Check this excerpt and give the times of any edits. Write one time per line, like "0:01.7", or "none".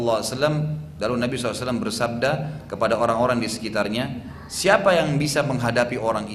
none